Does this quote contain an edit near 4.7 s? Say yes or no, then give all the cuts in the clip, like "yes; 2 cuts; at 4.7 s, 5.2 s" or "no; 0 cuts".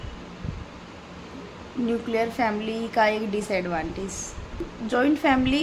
yes; 1 cut; at 4.7 s